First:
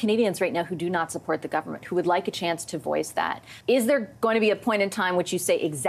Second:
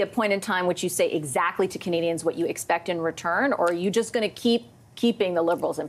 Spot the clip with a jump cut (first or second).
first